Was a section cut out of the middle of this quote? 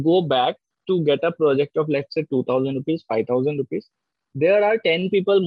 no; 0 cuts

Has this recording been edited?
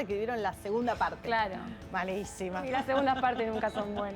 yes; 1 cut; at 2.7 s

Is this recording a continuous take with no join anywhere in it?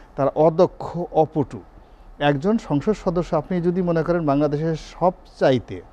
yes; 0 cuts

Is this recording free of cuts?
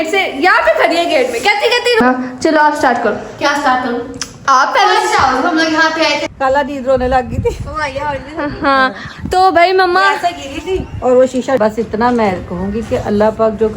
no; 3 cuts; at 2.0 s, 6.3 s, 11.6 s

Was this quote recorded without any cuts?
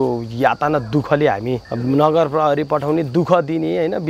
no; 1 cut; at 1.7 s

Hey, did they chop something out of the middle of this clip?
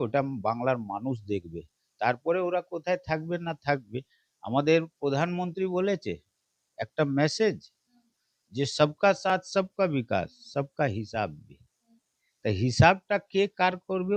no; 0 cuts

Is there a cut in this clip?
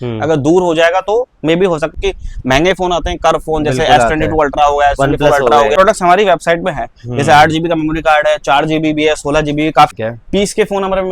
yes; 3 cuts; at 1.9 s, 5.7 s, 9.9 s

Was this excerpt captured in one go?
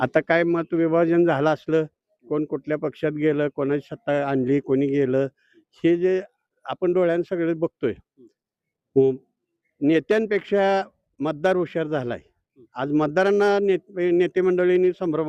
yes; 0 cuts

